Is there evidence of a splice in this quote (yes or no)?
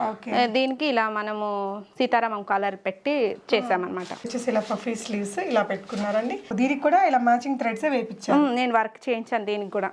yes